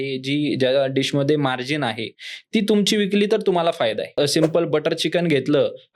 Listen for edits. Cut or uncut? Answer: cut